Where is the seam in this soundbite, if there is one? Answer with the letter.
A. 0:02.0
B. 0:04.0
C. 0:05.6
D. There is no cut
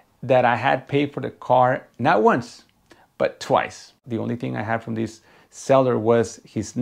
B